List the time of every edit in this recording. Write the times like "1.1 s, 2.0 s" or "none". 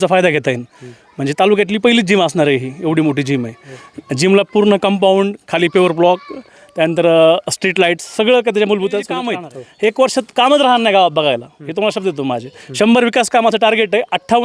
9.3 s